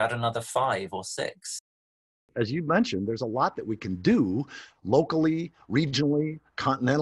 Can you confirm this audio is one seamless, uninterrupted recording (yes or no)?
no